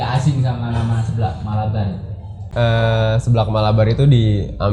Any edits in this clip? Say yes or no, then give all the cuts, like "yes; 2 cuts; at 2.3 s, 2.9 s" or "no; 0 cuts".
yes; 1 cut; at 2.4 s